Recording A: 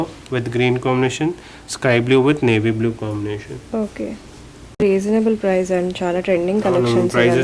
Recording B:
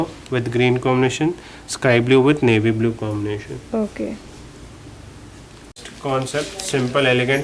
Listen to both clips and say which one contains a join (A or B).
A